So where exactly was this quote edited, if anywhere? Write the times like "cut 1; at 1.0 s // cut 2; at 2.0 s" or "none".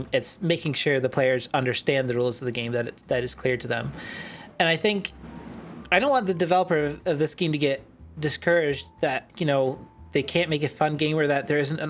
none